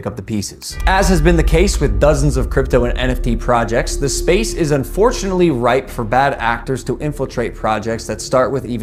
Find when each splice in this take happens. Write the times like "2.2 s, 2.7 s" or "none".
none

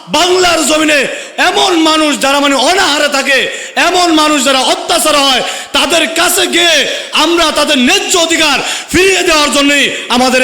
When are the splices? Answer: 1.2 s

